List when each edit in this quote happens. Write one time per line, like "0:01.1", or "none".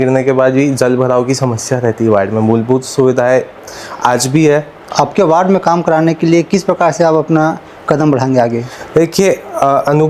0:04.8